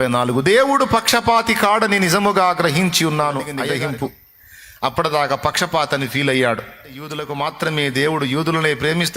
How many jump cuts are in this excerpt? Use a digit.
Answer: 2